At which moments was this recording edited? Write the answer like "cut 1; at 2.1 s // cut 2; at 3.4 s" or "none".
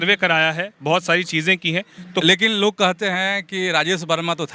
cut 1; at 2.2 s